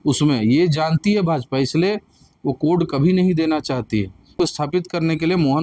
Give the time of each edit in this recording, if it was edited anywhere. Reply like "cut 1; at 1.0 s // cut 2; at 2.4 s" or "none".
cut 1; at 4.5 s

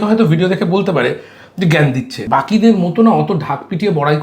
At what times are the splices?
cut 1; at 2.2 s

